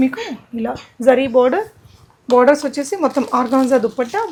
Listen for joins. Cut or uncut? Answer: uncut